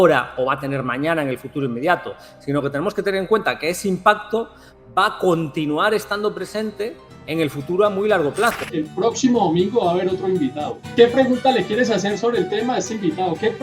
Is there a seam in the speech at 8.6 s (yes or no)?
yes